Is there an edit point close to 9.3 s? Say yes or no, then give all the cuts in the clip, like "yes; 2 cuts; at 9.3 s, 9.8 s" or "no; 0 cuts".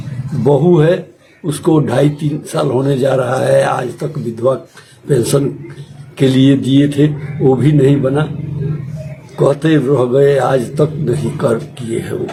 no; 0 cuts